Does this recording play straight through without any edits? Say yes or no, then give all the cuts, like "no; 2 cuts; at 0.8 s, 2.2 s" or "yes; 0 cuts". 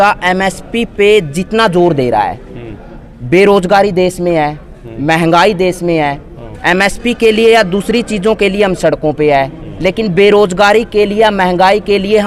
yes; 0 cuts